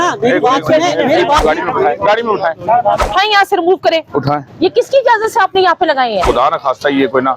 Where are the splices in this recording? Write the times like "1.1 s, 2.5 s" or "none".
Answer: 1.4 s, 3.0 s, 6.2 s